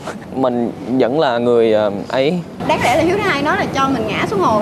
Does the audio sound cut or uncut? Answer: uncut